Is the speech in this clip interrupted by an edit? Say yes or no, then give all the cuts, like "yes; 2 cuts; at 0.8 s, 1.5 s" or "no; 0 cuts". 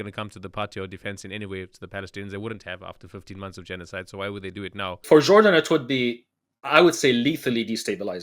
yes; 1 cut; at 5.0 s